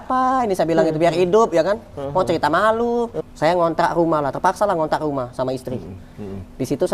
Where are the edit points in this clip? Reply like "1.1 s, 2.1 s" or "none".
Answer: 3.1 s